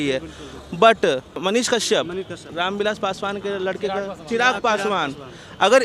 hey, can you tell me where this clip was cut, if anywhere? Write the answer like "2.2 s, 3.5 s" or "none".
1.3 s, 2.5 s